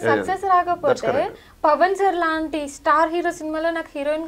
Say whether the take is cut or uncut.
uncut